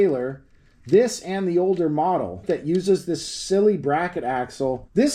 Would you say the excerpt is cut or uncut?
cut